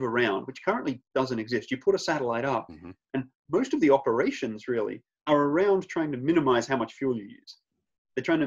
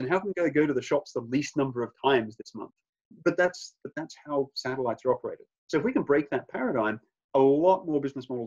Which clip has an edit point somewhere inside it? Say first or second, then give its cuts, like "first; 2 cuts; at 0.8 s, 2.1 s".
second; 1 cut; at 3.1 s